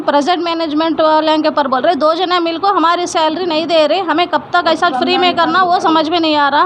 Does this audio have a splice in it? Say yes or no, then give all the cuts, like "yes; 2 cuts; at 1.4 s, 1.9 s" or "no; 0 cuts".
no; 0 cuts